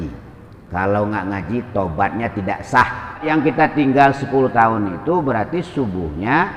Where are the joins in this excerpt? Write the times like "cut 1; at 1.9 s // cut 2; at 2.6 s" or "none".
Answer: cut 1; at 3.2 s